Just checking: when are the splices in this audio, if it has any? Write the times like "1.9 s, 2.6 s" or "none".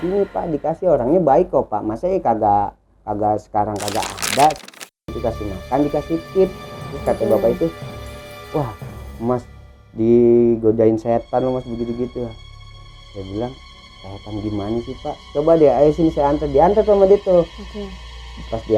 4.8 s